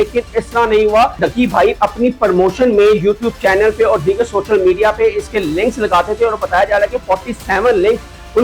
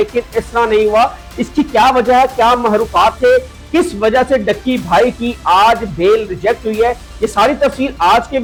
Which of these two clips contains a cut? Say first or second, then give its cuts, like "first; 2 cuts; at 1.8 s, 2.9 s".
first; 1 cut; at 1.2 s